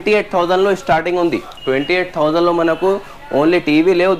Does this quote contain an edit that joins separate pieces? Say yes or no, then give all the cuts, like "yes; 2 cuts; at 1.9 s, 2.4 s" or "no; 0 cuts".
yes; 1 cut; at 1.5 s